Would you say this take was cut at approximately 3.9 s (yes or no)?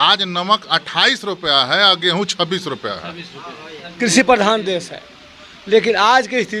yes